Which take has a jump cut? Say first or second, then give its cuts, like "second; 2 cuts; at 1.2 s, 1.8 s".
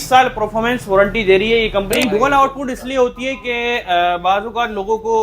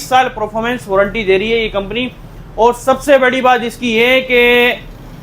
first; 1 cut; at 2.0 s